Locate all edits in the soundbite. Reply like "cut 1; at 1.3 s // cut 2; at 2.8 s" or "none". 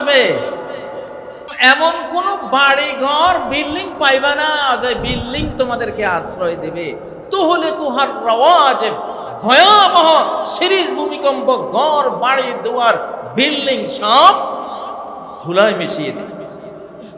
cut 1; at 1.4 s

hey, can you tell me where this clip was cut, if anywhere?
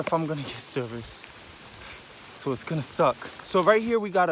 cut 1; at 3.3 s

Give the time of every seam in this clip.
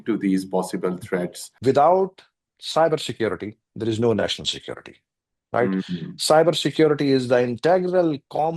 cut 1; at 1.4 s

